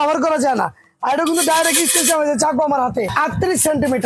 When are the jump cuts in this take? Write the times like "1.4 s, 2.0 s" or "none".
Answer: 3.1 s